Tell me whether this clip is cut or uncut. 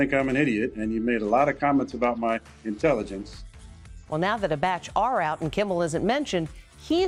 uncut